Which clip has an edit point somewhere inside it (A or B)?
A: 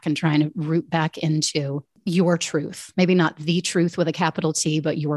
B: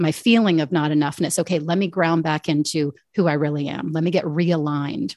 A